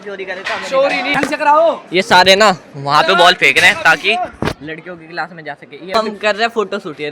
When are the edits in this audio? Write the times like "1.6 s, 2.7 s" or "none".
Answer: 1.2 s, 5.9 s